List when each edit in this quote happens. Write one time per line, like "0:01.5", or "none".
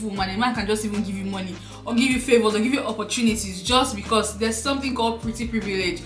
none